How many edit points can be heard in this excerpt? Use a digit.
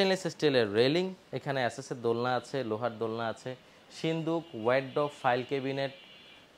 1